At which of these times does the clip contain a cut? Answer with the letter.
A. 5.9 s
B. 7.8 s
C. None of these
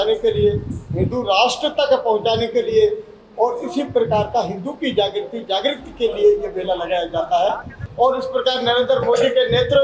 B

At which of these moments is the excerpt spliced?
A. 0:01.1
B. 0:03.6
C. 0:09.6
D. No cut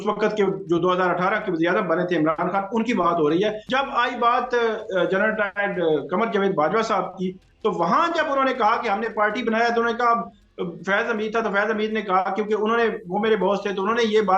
B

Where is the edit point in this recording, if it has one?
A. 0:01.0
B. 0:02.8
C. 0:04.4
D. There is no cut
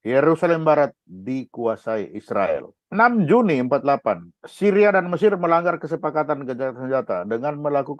B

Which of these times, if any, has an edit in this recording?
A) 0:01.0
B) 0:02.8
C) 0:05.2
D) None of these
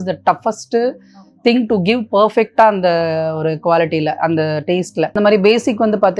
C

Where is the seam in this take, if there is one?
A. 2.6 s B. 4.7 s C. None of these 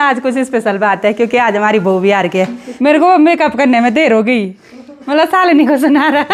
A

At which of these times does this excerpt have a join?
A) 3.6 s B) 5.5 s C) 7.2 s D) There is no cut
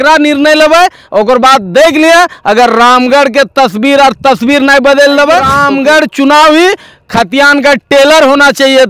B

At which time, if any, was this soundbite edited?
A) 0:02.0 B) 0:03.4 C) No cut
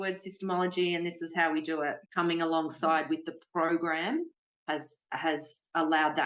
A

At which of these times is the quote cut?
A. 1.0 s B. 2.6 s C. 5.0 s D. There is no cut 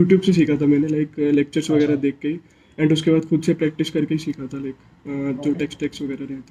D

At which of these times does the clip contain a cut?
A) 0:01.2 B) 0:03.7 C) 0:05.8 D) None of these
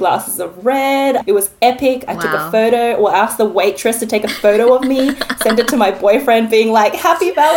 A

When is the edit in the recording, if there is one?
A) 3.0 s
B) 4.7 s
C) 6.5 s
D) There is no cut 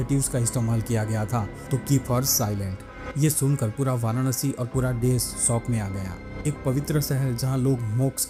D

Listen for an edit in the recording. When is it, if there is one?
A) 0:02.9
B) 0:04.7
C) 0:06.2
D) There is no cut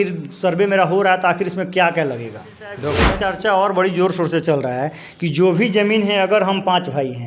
A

